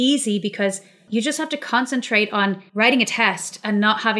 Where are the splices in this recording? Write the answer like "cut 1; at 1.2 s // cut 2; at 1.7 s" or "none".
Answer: cut 1; at 0.9 s // cut 2; at 2.6 s